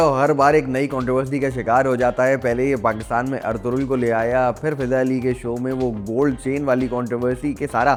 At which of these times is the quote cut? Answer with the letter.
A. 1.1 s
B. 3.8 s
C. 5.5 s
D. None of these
D